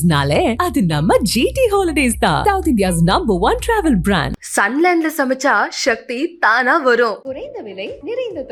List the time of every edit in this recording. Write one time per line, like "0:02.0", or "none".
none